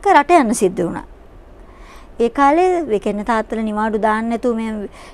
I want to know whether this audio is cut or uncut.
uncut